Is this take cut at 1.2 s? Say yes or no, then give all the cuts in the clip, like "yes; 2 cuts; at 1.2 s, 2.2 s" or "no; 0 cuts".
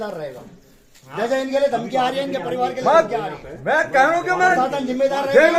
no; 0 cuts